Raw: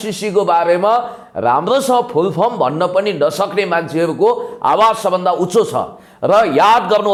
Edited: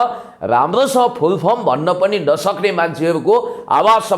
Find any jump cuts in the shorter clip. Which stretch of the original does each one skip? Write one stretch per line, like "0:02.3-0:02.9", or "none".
none